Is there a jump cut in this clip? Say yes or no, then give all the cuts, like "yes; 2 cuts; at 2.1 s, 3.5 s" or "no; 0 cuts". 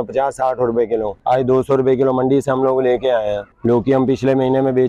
yes; 2 cuts; at 1.1 s, 3.5 s